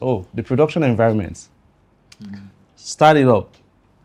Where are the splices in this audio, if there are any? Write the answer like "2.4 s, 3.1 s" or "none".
none